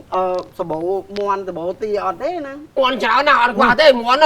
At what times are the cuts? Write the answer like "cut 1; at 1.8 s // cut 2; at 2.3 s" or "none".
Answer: cut 1; at 2.7 s